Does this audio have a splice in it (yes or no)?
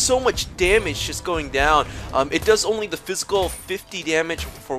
no